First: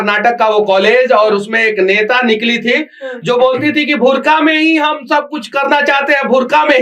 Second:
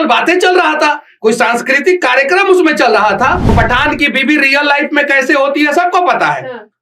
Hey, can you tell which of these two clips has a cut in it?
second; 1 cut; at 3.5 s

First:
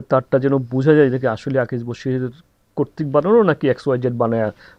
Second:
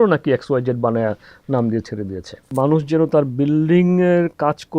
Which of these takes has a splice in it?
second; 1 cut; at 2.5 s

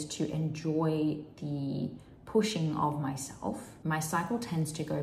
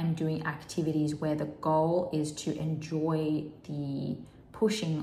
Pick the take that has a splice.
first; 1 cut; at 3.7 s

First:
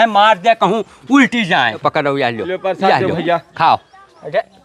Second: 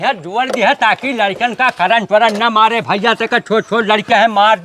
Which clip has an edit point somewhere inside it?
first; 1 cut; at 1.8 s

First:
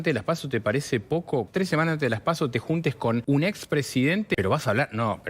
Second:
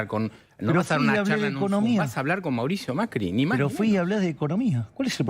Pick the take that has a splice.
first; 3 cuts; at 1.5 s, 3.2 s, 4.3 s

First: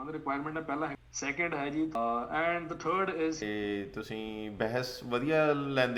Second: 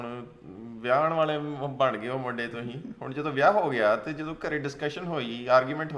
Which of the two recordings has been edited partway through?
first; 3 cuts; at 0.9 s, 2.0 s, 3.4 s

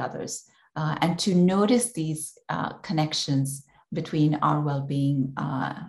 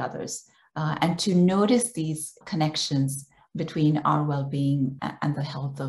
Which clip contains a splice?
second; 2 cuts; at 2.4 s, 5.0 s

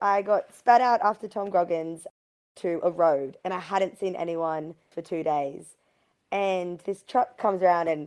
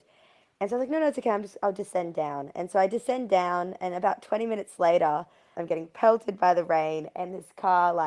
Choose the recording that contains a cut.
first; 2 cuts; at 4.9 s, 6.8 s

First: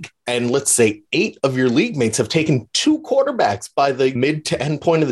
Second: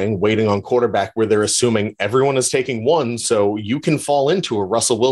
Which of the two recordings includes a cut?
first; 1 cut; at 4.1 s

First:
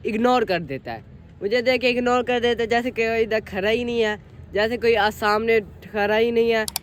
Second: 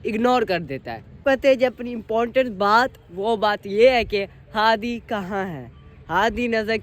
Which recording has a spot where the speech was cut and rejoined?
second; 1 cut; at 1.2 s

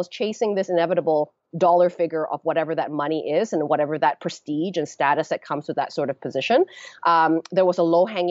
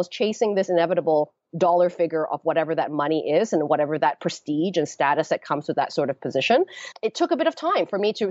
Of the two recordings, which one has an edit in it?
second; 1 cut; at 6.9 s

